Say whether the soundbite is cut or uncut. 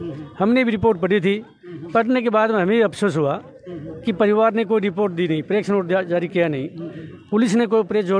uncut